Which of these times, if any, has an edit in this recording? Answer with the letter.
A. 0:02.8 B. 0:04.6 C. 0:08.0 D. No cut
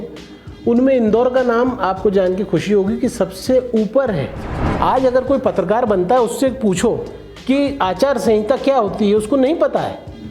B